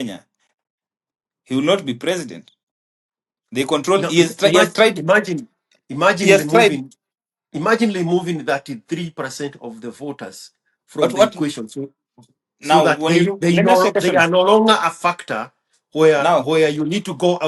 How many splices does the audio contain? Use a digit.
0